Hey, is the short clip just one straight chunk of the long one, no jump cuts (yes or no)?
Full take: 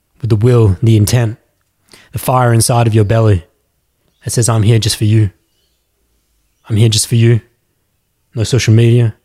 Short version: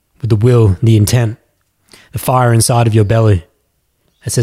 yes